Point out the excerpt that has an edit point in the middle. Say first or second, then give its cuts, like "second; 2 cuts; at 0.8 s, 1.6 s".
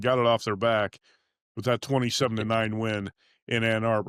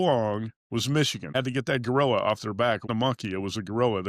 second; 2 cuts; at 1.3 s, 2.9 s